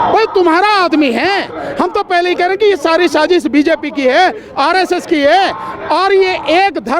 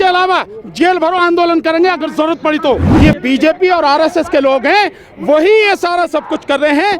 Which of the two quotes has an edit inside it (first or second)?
second